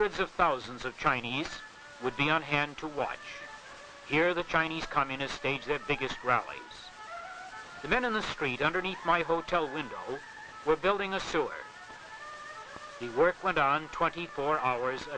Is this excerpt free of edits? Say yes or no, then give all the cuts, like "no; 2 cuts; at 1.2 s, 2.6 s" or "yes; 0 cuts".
no; 1 cut; at 1.2 s